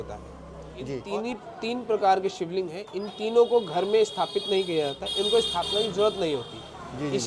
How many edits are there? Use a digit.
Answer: 1